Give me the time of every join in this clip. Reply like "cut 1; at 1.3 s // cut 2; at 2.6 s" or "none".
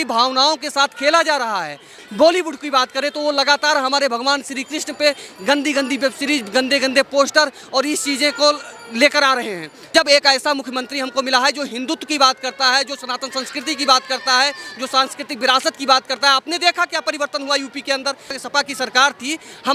cut 1; at 1.9 s // cut 2; at 9.9 s // cut 3; at 18.4 s